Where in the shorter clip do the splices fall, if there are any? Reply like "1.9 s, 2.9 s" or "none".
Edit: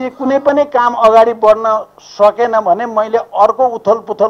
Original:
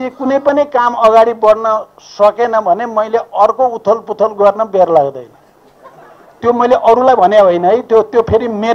none